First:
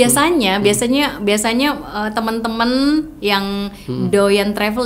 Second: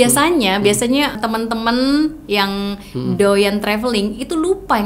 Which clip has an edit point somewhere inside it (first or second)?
second